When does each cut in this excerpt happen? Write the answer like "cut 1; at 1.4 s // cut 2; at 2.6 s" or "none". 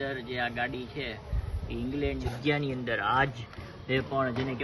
cut 1; at 2.2 s